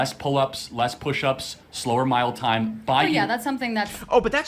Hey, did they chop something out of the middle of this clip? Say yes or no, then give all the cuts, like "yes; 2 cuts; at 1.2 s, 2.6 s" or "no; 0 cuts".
no; 0 cuts